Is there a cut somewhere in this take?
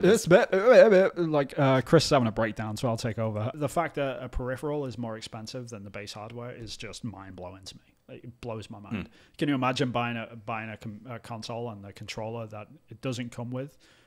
yes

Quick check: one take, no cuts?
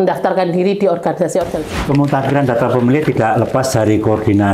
no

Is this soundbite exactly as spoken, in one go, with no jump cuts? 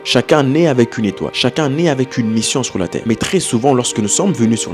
no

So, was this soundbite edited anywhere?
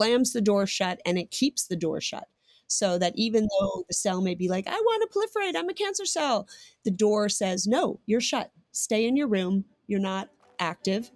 no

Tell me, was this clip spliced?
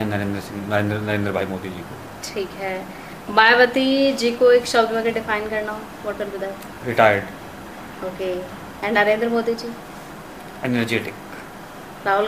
no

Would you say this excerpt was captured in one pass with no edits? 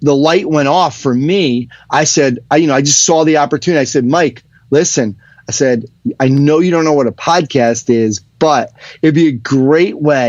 yes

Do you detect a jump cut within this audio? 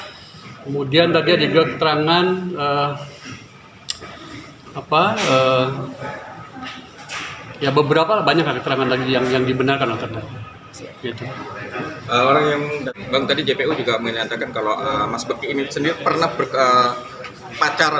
yes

